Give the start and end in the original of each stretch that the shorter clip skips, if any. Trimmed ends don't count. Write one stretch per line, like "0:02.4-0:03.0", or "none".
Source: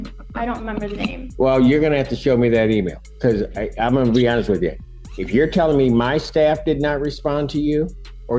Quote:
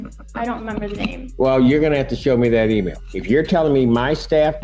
0:03.0-0:05.1